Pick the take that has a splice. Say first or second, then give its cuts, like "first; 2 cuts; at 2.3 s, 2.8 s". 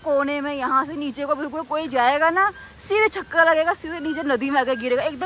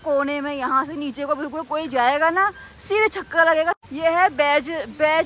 second; 1 cut; at 3.9 s